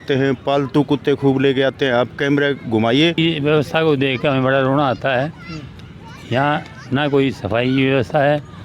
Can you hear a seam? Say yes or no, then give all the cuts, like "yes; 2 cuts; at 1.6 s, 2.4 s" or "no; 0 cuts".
yes; 1 cut; at 3.2 s